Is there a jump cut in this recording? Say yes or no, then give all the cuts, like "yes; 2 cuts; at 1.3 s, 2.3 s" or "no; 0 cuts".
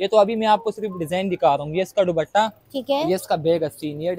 no; 0 cuts